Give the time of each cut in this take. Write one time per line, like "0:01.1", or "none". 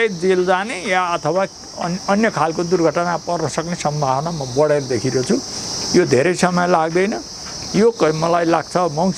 none